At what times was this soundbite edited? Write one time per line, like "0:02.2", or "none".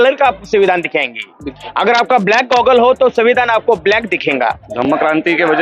0:04.7